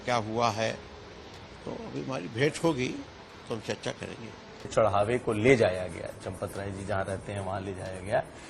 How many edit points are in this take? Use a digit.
1